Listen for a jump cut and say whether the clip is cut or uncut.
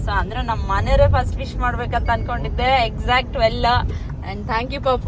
uncut